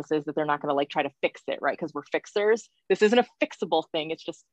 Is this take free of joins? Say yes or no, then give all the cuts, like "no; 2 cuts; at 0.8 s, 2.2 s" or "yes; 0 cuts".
yes; 0 cuts